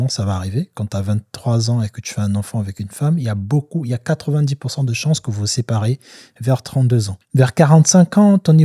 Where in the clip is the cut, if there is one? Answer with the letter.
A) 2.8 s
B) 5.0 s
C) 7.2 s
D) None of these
C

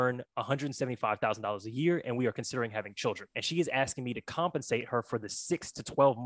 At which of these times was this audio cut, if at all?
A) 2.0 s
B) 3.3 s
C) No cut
B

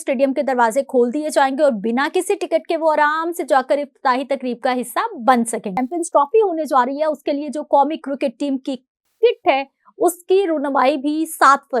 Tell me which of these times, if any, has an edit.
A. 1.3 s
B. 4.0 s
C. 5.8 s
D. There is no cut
C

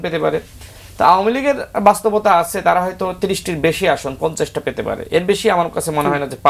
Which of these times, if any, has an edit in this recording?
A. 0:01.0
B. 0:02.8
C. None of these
C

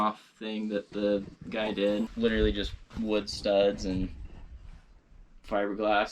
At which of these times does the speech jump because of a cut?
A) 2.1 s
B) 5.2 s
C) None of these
A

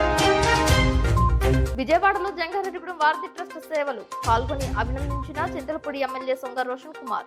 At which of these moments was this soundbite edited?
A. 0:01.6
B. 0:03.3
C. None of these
A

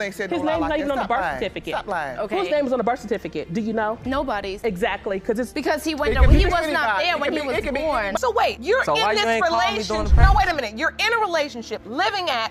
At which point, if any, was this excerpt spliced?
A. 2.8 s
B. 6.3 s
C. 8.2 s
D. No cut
C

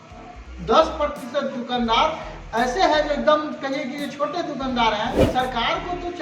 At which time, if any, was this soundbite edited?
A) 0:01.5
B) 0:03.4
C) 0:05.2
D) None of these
C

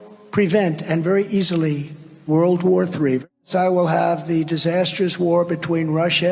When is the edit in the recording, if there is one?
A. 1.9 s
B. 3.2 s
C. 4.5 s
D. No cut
B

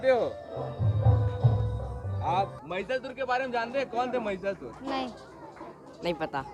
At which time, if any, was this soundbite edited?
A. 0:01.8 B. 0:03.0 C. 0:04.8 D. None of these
B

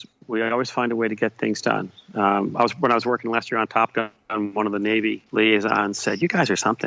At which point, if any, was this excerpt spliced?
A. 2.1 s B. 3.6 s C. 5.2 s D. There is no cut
C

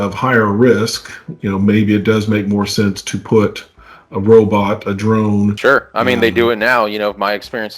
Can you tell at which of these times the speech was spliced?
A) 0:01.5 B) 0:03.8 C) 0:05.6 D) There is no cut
C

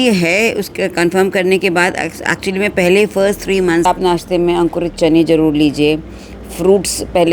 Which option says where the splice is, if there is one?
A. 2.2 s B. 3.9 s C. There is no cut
B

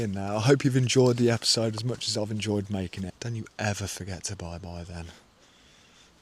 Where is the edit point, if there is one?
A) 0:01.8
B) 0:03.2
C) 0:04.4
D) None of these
B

